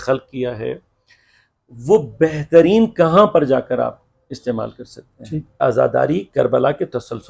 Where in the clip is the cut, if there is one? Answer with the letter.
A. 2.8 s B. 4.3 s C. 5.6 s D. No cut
C